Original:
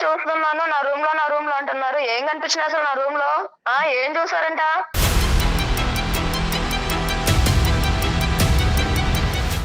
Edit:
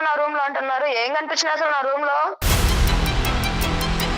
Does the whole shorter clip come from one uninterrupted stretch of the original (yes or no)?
no